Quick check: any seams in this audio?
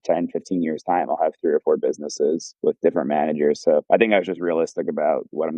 yes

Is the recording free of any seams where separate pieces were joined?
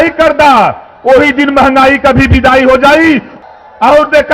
no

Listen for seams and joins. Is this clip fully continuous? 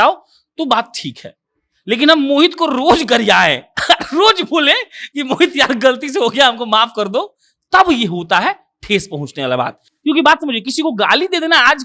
yes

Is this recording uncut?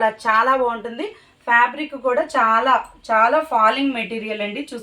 yes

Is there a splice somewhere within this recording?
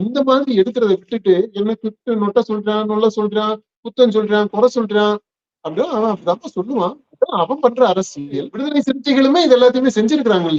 yes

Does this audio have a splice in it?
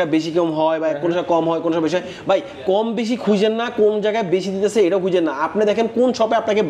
no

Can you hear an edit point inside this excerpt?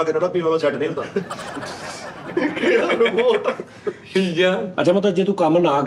no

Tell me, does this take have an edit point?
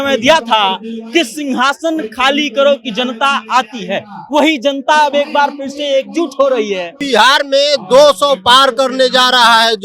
yes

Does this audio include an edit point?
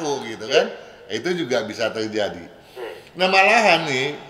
no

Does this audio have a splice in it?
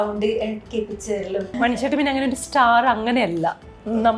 yes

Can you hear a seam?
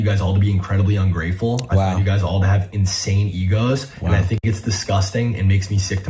no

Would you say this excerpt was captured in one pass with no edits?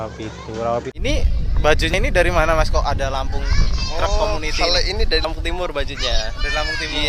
no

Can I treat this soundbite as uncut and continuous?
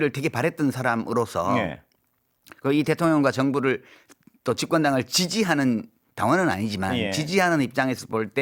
yes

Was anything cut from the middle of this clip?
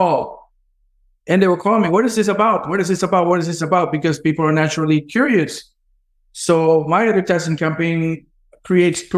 no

